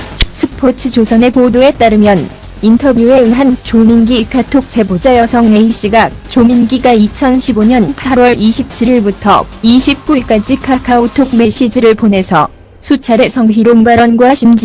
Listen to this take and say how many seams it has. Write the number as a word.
one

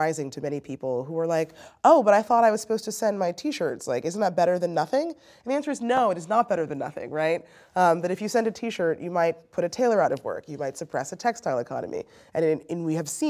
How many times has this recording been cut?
zero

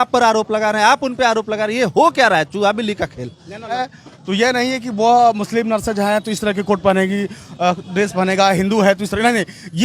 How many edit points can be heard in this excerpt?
one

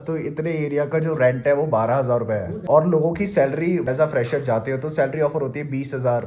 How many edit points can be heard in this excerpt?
two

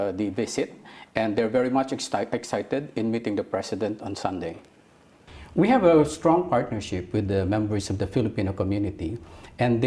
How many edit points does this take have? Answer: one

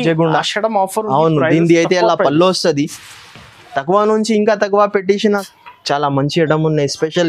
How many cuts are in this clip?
one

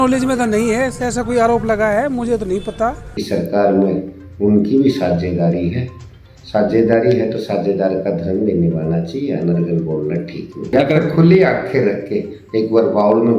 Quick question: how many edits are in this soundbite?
two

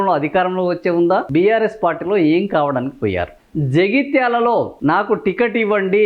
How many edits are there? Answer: three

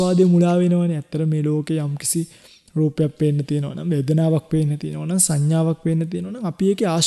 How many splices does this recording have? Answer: zero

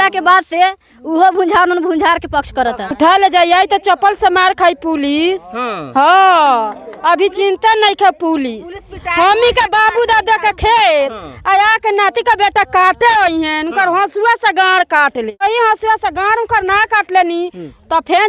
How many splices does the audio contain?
two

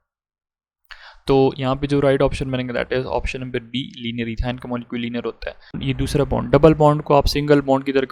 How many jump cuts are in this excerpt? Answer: one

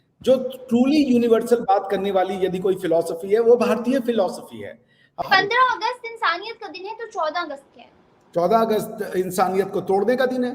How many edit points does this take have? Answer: one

